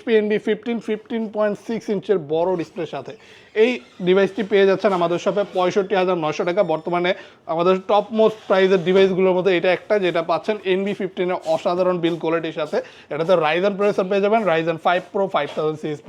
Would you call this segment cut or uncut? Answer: uncut